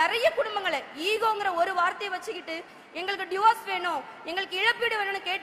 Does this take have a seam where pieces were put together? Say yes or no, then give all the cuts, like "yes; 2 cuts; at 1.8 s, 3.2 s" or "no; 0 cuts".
no; 0 cuts